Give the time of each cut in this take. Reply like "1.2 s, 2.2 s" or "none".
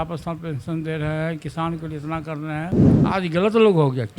2.9 s